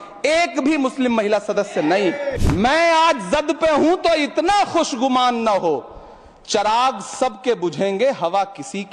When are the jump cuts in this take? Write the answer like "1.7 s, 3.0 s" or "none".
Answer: 2.4 s